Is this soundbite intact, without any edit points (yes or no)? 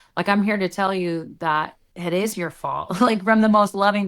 no